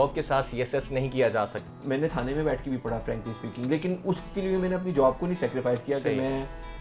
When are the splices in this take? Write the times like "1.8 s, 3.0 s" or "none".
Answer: 1.7 s